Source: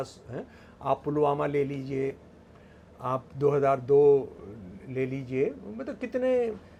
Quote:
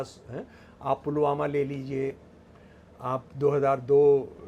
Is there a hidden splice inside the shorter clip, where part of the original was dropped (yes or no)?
no